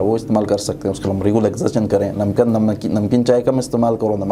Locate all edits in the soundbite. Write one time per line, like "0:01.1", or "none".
none